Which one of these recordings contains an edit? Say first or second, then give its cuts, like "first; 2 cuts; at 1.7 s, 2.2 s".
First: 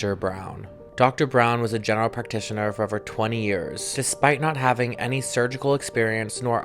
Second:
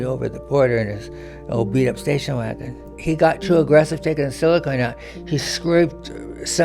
second; 1 cut; at 2.9 s